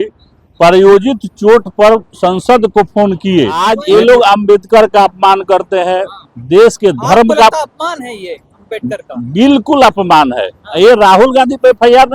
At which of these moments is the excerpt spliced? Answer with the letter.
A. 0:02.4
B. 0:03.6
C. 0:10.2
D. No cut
B